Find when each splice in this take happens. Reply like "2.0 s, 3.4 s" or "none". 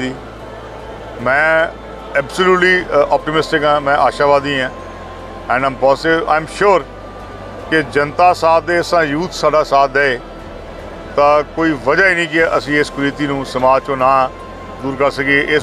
none